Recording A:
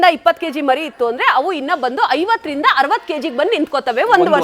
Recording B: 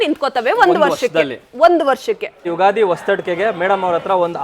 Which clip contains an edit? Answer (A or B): B